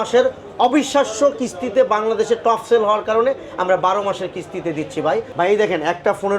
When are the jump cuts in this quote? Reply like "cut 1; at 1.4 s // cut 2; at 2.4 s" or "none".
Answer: cut 1; at 5.2 s